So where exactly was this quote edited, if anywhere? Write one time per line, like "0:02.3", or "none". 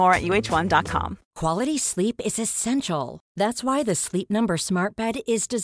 0:01.2